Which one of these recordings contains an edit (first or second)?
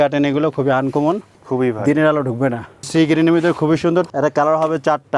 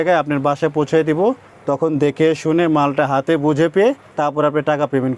first